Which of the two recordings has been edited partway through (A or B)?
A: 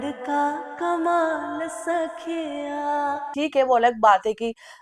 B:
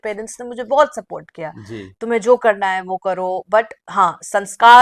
A